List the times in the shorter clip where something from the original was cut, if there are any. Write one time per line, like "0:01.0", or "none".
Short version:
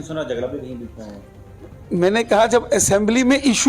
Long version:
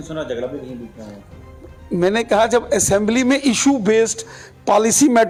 none